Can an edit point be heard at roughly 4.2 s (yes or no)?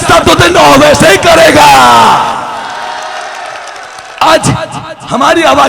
yes